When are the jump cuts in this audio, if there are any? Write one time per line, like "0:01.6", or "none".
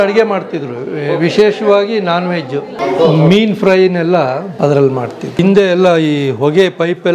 0:02.7
0:04.5
0:05.4

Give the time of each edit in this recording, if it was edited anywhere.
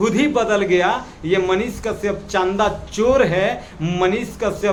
none

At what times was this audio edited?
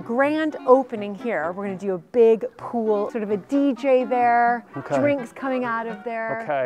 0:03.1

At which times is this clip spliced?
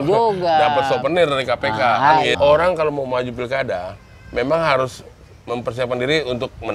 0:02.3

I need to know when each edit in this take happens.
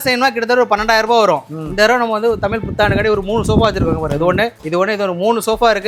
none

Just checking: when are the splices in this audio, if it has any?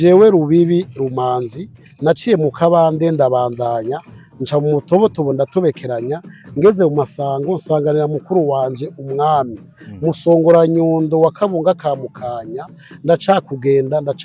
none

